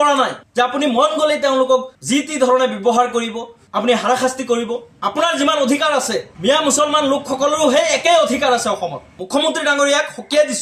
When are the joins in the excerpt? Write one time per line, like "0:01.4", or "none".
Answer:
0:04.9
0:09.2